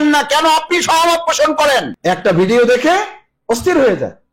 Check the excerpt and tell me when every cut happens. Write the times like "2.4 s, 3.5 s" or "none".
1.9 s